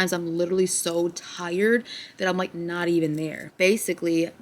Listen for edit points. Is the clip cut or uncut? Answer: uncut